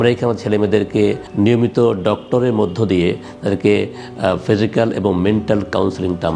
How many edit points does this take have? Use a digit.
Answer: 1